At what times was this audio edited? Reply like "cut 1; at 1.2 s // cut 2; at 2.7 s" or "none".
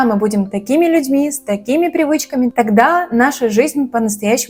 none